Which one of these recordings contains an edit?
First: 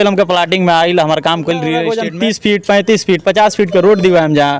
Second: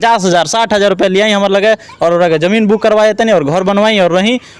first; 1 cut; at 1.7 s

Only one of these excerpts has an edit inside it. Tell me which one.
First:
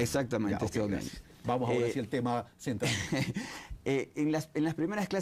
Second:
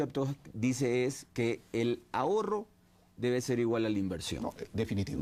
first; 1 cut; at 2.1 s

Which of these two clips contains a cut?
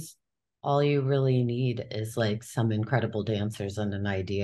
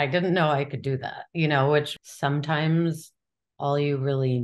second; 1 cut; at 1.9 s

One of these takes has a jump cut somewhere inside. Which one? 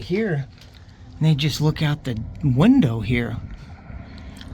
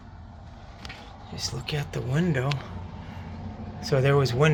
first; 1 cut; at 3.5 s

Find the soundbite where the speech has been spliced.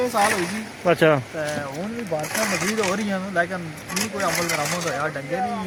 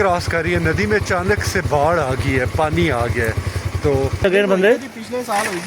second; 1 cut; at 4.2 s

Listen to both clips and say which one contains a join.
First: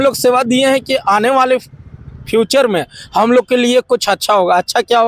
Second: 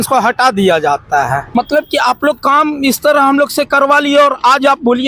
second; 1 cut; at 1.4 s

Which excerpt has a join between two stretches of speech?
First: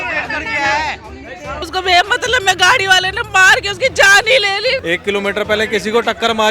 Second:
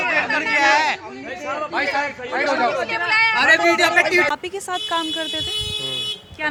first; 2 cuts; at 1.7 s, 4.8 s

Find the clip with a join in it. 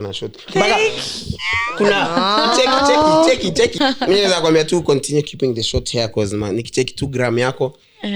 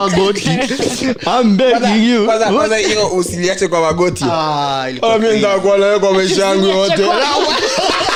first; 1 cut; at 3.7 s

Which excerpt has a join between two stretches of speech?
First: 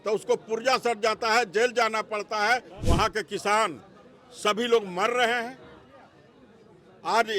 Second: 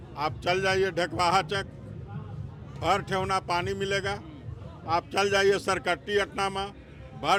first; 1 cut; at 2.8 s

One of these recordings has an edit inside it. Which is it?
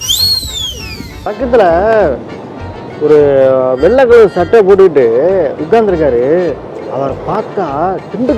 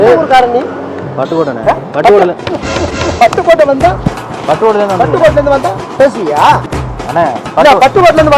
first; 1 cut; at 1.3 s

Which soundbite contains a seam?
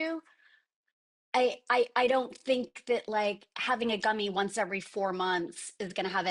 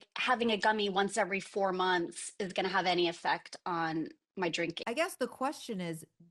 second; 1 cut; at 4.8 s

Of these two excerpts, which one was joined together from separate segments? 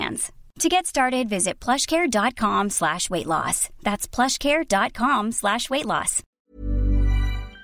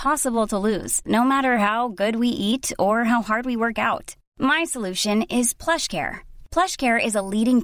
first; 1 cut; at 6.2 s

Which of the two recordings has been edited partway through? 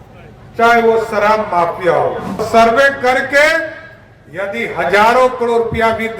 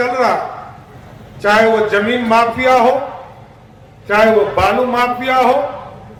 first; 1 cut; at 2.5 s

